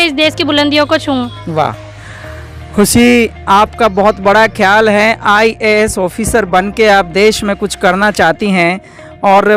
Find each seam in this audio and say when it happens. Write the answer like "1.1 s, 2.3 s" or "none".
none